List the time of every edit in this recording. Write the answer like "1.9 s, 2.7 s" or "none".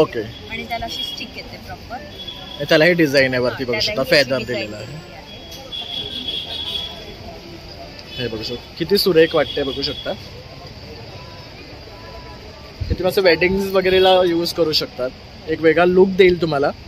none

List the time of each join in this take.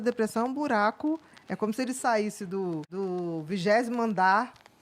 2.9 s

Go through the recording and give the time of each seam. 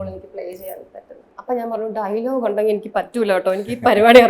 1.3 s

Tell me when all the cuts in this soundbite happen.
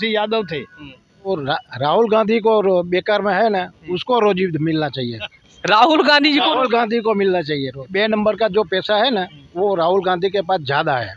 1.3 s, 7.9 s

